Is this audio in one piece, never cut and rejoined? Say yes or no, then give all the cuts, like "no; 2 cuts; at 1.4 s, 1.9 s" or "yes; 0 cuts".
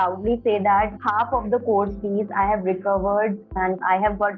no; 2 cuts; at 1.0 s, 3.5 s